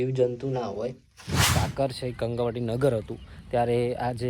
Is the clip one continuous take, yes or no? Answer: no